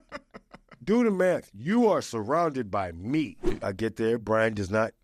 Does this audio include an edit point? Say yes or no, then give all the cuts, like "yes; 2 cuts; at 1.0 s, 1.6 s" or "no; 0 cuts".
yes; 1 cut; at 3.5 s